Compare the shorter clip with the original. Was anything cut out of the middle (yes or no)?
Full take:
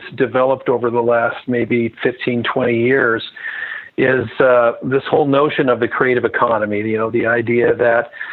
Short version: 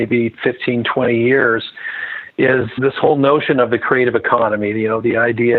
yes